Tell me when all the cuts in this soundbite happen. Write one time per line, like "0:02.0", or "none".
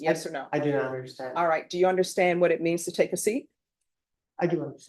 none